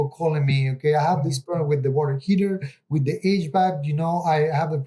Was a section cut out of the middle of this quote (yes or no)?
no